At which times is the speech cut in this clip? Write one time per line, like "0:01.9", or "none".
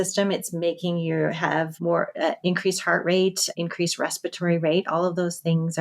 0:01.7
0:03.4